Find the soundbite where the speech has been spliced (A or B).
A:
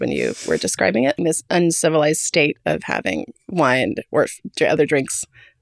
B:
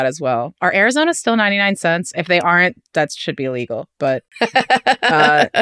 A